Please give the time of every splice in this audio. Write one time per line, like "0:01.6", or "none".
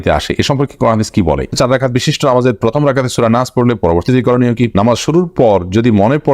0:01.5
0:04.7